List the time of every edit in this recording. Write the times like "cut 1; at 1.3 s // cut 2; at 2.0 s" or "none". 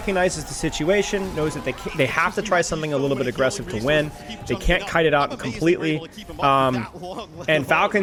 none